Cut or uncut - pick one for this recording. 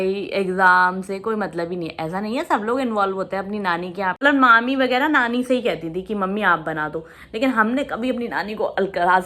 cut